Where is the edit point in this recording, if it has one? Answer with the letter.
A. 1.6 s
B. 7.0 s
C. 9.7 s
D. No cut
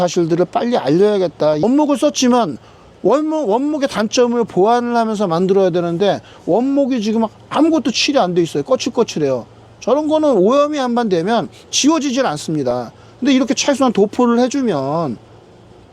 A